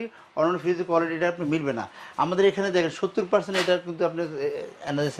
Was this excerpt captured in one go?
yes; 0 cuts

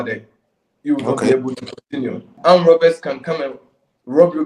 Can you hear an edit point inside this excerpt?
yes; 1 cut; at 2.3 s

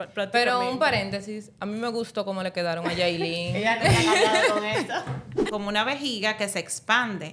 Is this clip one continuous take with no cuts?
no; 1 cut; at 5.4 s

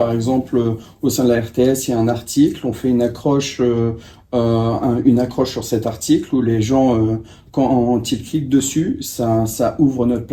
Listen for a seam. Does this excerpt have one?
no; 0 cuts

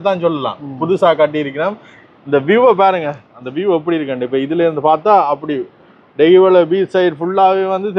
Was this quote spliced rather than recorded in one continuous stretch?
no; 0 cuts

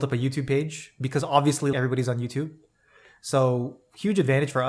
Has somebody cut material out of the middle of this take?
no; 0 cuts

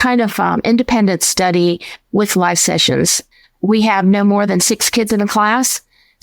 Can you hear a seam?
yes; 1 cut; at 3.2 s

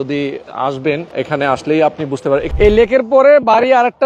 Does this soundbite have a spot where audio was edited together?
yes; 2 cuts; at 1.1 s, 2.5 s

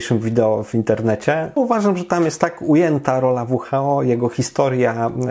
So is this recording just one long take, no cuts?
no; 1 cut; at 1.6 s

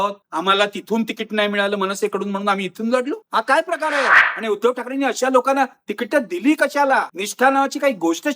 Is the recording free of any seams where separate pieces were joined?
no; 1 cut; at 4.2 s

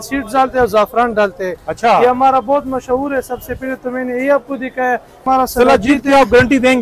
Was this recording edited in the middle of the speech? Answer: yes; 1 cut; at 5.2 s

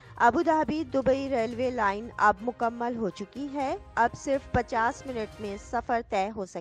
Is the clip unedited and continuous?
yes; 0 cuts

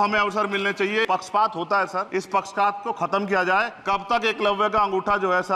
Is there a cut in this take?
yes; 3 cuts; at 1.1 s, 2.1 s, 3.8 s

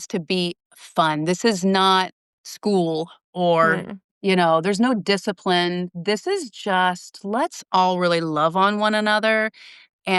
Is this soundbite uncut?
yes; 0 cuts

